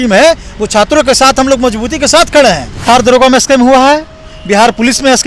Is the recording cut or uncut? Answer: cut